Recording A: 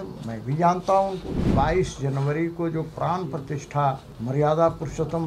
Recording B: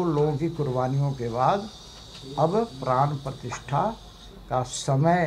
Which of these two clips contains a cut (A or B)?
A